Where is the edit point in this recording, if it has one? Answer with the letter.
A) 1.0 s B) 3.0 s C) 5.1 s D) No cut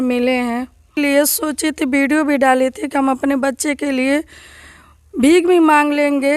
A